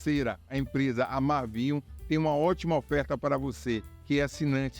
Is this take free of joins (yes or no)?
no